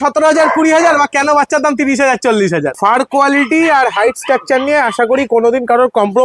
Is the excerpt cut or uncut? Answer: cut